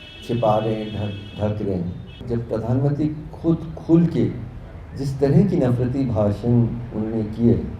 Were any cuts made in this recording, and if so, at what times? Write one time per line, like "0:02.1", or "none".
0:02.2